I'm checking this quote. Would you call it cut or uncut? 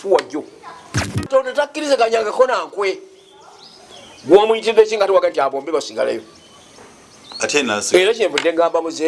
cut